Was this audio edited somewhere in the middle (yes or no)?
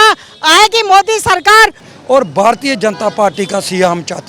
yes